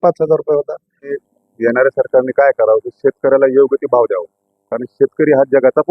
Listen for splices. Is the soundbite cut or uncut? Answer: cut